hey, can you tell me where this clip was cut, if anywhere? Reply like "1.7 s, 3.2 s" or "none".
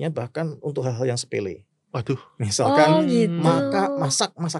none